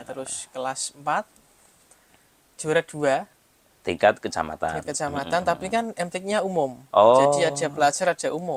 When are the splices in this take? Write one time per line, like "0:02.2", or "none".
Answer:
none

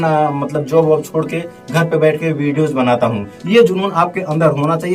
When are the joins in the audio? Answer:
0:03.3

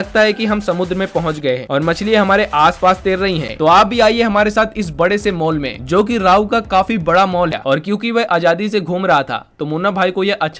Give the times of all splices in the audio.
0:03.5
0:07.6

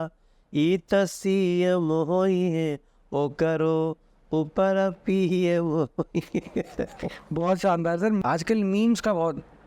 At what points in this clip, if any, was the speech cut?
0:08.2

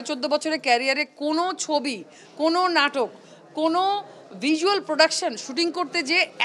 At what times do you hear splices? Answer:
none

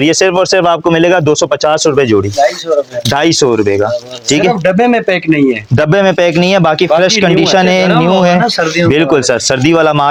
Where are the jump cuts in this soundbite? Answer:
none

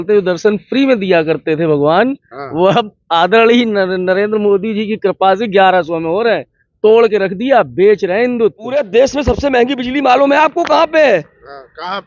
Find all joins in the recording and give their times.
0:08.6

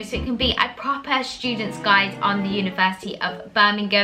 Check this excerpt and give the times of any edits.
none

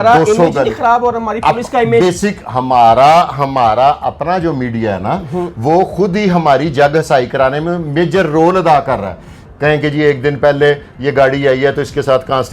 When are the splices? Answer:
0:09.4

